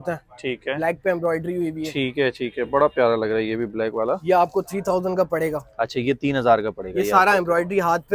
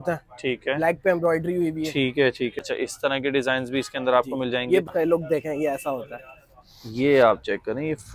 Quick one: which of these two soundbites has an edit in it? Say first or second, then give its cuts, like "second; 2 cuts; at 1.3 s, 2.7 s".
second; 2 cuts; at 2.6 s, 4.9 s